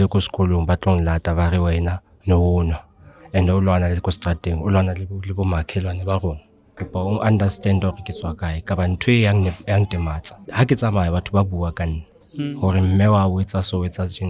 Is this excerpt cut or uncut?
cut